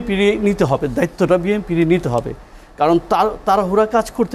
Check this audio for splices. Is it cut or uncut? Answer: uncut